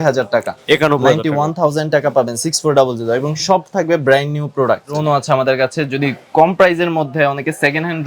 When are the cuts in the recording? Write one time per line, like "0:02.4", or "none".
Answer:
0:04.9